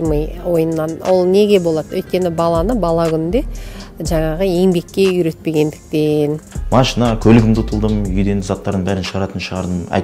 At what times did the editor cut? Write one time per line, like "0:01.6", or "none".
0:06.5

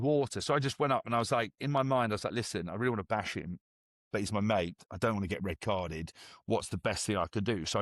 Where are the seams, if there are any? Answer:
none

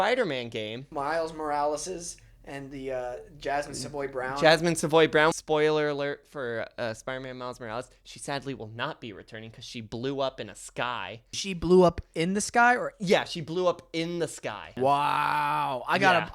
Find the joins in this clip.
0:00.9
0:05.3
0:11.3
0:14.7

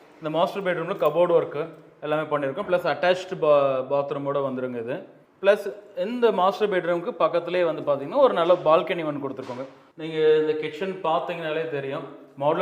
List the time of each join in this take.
0:09.8

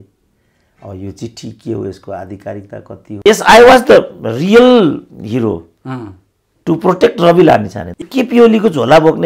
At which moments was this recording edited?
0:03.2
0:07.8

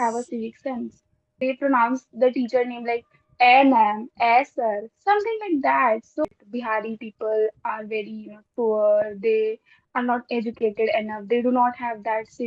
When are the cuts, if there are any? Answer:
0:01.3
0:06.2

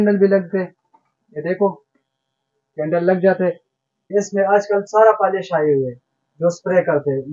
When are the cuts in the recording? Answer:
0:04.0

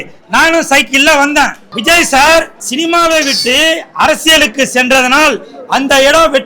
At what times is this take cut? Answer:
0:01.7
0:02.6

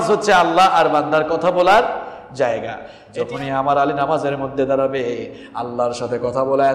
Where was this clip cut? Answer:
0:02.9

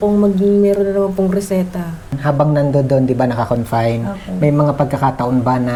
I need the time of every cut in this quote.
none

